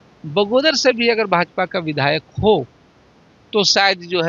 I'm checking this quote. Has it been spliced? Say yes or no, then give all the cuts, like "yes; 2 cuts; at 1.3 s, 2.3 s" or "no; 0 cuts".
no; 0 cuts